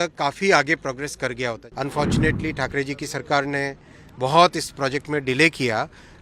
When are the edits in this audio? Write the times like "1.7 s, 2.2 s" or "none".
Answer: 1.6 s